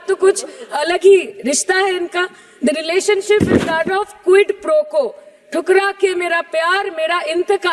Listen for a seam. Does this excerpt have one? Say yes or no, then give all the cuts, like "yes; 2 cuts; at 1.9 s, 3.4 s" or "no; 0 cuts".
no; 0 cuts